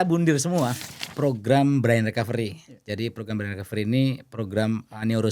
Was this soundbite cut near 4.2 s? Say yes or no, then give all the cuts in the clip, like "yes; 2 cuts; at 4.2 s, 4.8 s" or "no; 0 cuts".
no; 1 cut; at 1.1 s